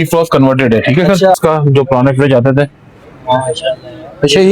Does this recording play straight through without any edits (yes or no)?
no